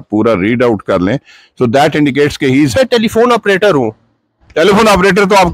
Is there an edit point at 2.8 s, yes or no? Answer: yes